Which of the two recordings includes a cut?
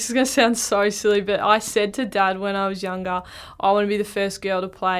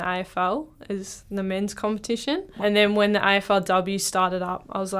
second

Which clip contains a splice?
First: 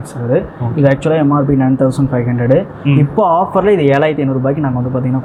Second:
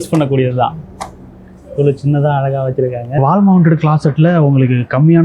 second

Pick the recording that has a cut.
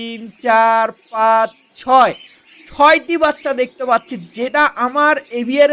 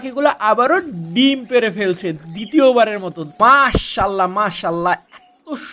second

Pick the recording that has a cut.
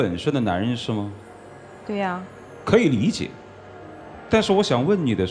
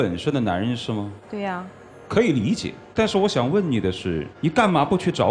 second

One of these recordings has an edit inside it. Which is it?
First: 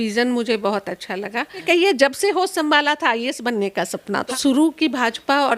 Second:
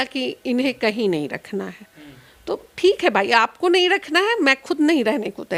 first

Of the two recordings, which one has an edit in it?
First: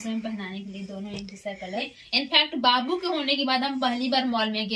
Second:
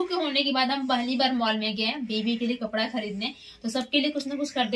first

